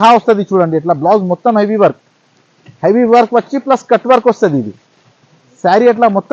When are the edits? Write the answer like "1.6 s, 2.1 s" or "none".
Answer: none